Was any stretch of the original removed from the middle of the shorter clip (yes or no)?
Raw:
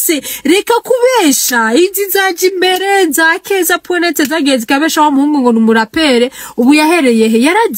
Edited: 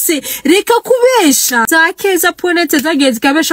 yes